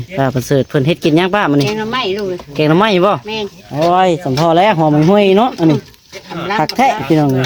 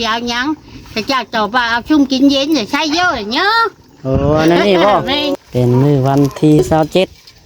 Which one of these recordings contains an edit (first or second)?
second